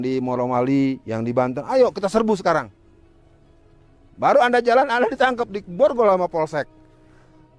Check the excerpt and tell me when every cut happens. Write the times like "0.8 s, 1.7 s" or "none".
none